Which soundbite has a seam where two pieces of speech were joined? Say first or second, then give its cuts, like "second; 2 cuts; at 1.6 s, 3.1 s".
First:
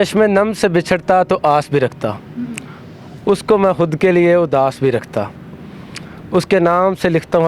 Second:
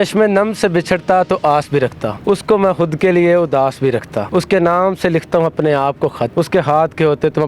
second; 3 cuts; at 2.1 s, 4.3 s, 6.3 s